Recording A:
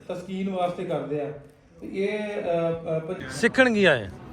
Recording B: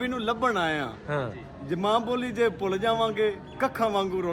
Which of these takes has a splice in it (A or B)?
A